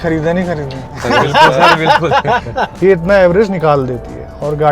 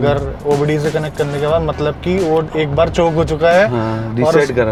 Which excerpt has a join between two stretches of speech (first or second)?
first